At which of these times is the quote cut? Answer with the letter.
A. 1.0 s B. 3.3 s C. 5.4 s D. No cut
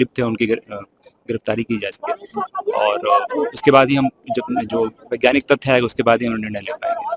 D